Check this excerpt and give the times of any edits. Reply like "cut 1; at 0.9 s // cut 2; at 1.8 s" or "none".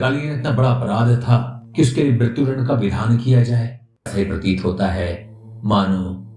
cut 1; at 4.1 s